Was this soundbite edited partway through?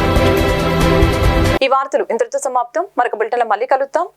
no; 0 cuts

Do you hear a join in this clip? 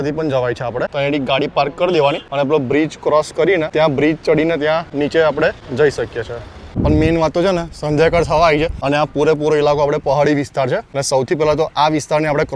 yes; 8 cuts; at 0.9 s, 2.2 s, 3.7 s, 4.9 s, 5.6 s, 6.7 s, 8.8 s, 10.9 s

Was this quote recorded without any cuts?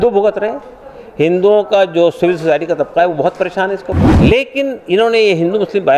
no; 1 cut; at 4.1 s

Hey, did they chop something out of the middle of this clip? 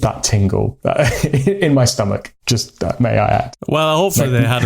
yes; 1 cut; at 2.3 s

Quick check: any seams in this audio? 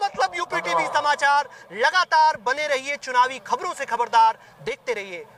no; 0 cuts

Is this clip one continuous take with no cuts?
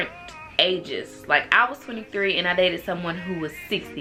yes; 0 cuts

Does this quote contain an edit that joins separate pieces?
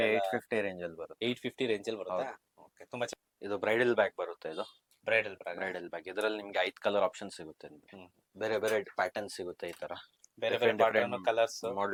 no; 0 cuts

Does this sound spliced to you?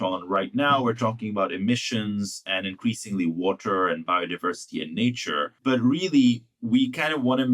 yes; 1 cut; at 5.5 s

